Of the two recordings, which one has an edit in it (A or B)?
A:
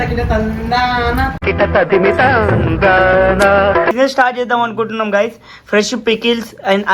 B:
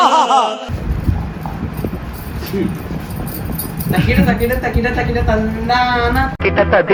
A